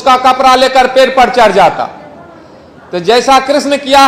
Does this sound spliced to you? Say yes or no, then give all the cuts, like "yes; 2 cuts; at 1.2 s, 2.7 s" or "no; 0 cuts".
no; 0 cuts